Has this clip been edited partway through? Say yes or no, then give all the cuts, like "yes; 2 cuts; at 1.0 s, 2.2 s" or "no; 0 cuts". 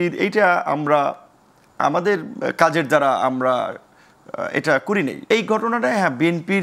yes; 1 cut; at 5.3 s